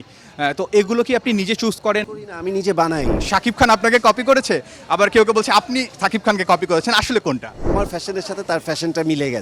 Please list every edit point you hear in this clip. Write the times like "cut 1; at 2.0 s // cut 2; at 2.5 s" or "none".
cut 1; at 3.2 s // cut 2; at 7.7 s